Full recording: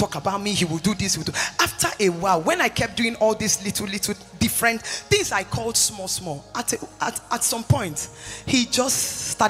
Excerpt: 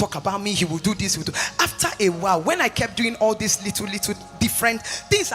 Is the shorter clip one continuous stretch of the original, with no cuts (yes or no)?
yes